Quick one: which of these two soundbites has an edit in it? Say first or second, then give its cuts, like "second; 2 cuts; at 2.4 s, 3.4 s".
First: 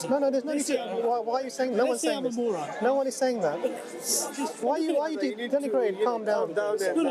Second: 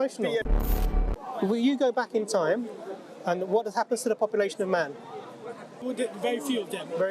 second; 2 cuts; at 0.8 s, 5.8 s